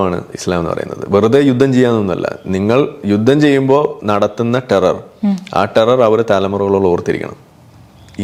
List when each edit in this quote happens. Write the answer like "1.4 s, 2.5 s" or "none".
none